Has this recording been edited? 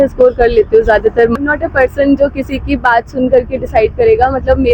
yes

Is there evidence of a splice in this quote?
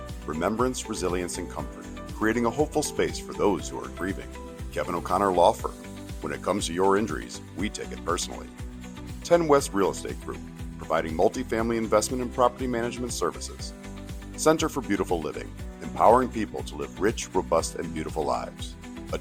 no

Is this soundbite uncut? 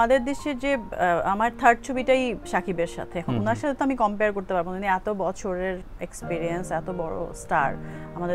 no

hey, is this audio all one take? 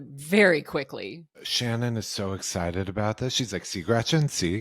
no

